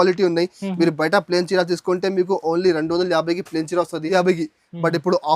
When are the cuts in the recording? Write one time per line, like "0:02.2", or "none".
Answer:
0:04.0